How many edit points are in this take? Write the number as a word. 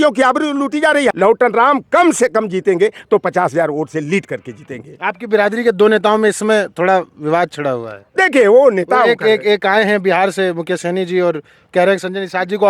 one